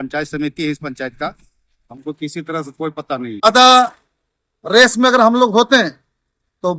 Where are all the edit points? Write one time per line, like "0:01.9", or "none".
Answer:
0:03.5